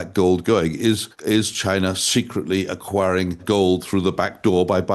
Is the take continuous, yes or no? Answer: no